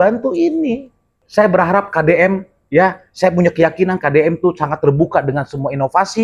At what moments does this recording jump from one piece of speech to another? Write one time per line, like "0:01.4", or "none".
0:01.2